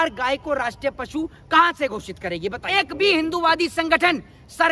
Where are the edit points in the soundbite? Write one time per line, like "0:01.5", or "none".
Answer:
0:02.6